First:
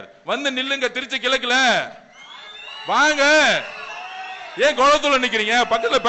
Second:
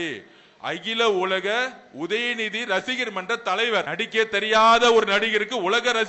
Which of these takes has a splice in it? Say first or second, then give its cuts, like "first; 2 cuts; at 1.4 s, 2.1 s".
second; 1 cut; at 3.9 s